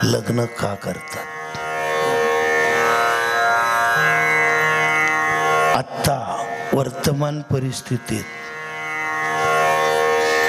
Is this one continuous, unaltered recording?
yes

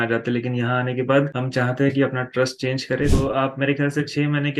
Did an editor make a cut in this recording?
yes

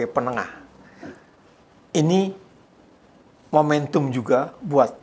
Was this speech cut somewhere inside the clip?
yes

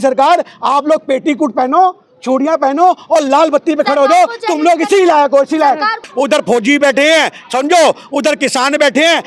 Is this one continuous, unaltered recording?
no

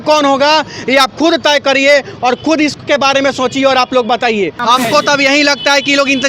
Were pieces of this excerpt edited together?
yes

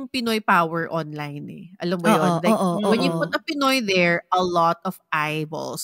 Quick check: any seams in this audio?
no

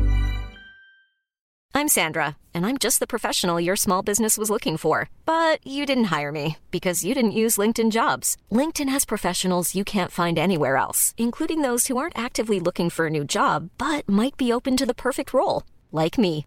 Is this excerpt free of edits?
no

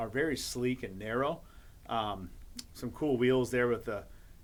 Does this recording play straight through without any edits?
yes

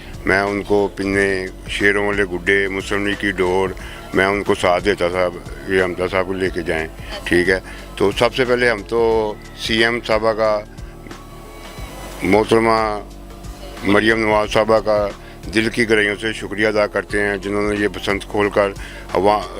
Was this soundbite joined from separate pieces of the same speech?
no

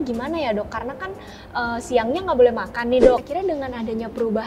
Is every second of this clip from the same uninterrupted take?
no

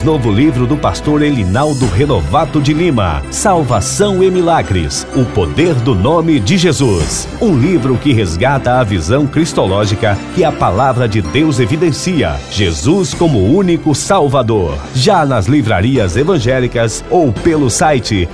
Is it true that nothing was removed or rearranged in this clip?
yes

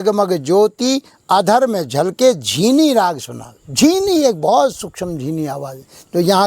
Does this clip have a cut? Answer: no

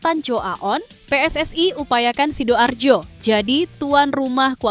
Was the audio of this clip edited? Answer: yes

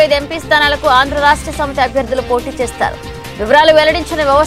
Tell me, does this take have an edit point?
no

